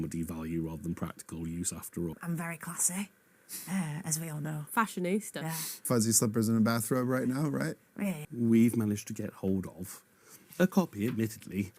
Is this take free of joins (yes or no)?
no